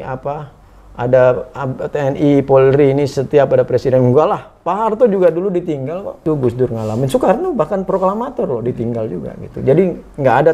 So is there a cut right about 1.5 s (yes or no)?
no